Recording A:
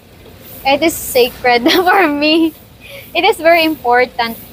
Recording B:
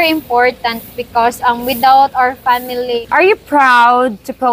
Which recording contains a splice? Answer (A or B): B